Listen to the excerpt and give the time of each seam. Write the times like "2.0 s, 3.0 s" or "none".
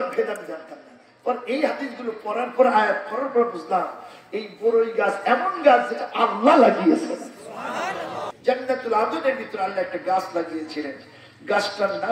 8.2 s

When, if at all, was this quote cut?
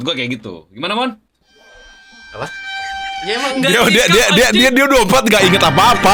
none

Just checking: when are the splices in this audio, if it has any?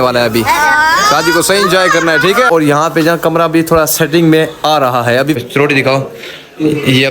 2.5 s, 5.4 s

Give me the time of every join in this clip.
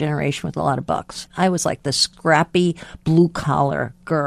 1.2 s, 2.1 s

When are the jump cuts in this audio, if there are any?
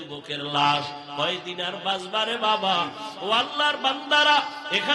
3.0 s

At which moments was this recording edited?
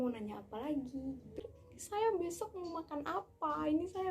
1.4 s

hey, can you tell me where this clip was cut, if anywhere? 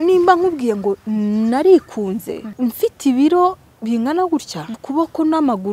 2.5 s, 4.8 s

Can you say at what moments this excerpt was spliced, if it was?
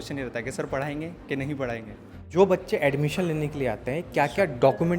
2.3 s

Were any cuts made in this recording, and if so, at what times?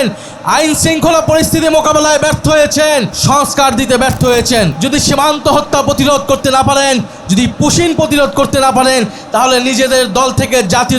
3.1 s, 4.8 s

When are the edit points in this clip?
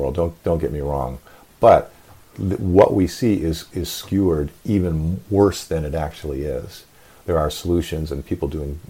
none

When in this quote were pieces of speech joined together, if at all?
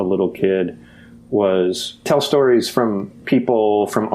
2.1 s, 3.1 s

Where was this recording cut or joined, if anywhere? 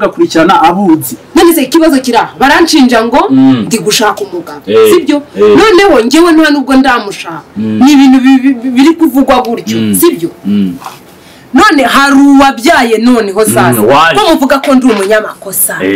none

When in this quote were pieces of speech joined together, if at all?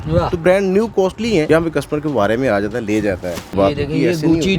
1.5 s, 3.5 s

